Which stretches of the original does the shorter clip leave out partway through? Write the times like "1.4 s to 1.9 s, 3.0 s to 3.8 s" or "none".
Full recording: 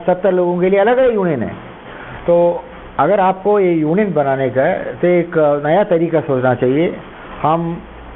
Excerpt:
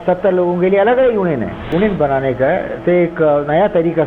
1.7 s to 3.9 s